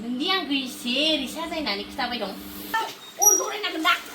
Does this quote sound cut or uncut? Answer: cut